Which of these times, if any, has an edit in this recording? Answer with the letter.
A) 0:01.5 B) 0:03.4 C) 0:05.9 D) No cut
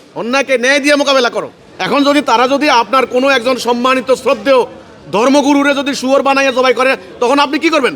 A